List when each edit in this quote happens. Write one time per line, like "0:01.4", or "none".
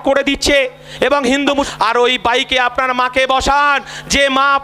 0:01.7